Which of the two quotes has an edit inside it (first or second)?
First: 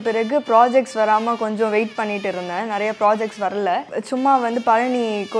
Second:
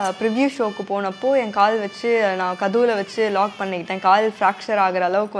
first